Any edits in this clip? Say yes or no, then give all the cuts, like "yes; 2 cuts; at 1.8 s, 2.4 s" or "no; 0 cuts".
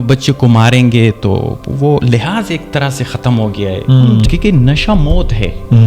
yes; 1 cut; at 4.2 s